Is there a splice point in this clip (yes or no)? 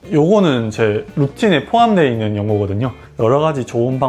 yes